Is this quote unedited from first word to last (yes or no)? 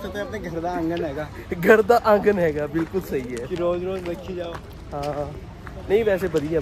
yes